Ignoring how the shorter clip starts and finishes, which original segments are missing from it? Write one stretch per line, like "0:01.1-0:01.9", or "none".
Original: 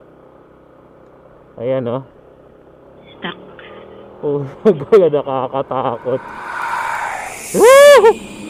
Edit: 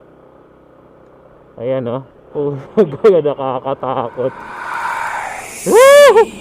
0:02.2-0:04.1